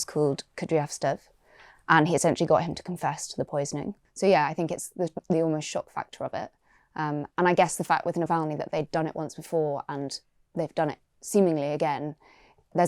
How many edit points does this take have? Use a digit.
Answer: 1